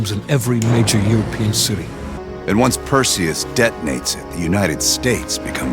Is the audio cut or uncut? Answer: cut